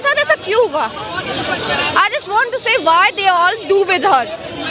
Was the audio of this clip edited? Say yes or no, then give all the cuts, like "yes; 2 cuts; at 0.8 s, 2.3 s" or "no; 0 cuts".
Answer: no; 0 cuts